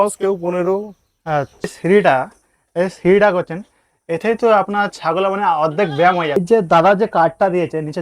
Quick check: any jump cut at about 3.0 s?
no; 2 cuts; at 1.8 s, 6.4 s

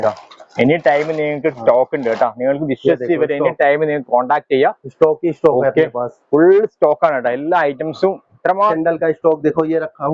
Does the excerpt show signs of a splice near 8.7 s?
yes; 1 cut; at 8.7 s

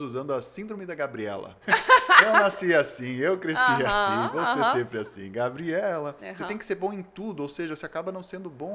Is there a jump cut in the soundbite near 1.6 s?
yes; 2 cuts; at 1.6 s, 6.3 s

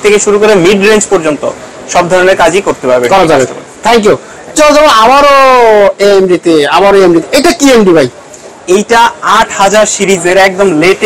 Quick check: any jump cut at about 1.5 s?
no; 0 cuts

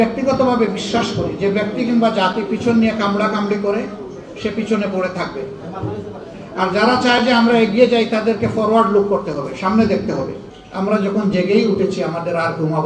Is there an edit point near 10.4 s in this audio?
yes; 2 cuts; at 6.3 s, 10.4 s

